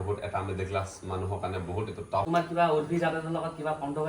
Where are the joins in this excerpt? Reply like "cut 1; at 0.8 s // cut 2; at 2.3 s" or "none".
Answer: cut 1; at 2.3 s